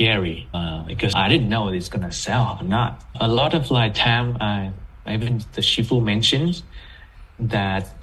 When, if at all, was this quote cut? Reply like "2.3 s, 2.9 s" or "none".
none